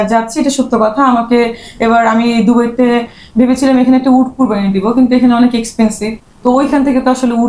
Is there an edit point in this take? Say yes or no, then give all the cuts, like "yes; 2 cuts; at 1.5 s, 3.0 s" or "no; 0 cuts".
no; 0 cuts